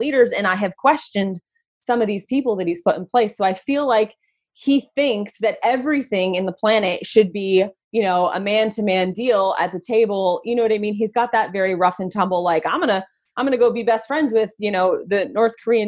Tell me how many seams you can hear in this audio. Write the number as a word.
zero